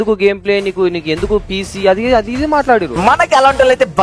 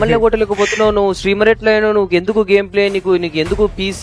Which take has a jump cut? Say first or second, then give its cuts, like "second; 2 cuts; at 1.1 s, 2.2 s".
first; 1 cut; at 3.0 s